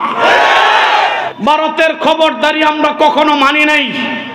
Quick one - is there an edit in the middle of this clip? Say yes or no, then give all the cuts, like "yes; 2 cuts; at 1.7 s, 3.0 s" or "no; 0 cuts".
yes; 1 cut; at 1.2 s